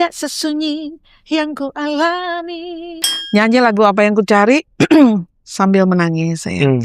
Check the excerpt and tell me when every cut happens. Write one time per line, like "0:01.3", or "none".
0:02.9